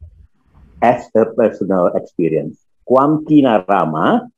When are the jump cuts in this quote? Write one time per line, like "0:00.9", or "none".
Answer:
0:02.7